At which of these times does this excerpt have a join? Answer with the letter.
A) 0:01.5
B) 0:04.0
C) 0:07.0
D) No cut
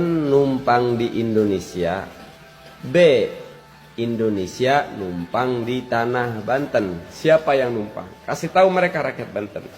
C